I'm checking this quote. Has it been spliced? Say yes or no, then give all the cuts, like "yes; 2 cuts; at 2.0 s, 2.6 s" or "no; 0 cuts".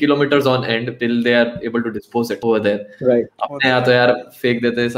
yes; 2 cuts; at 0.9 s, 2.4 s